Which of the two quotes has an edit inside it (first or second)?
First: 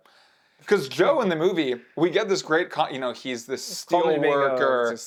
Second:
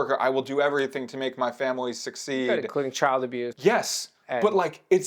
second